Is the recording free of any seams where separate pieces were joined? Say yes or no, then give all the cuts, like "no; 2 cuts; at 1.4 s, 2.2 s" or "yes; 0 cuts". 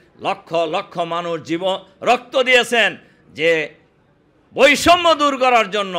yes; 0 cuts